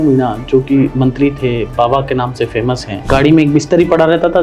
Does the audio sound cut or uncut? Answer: cut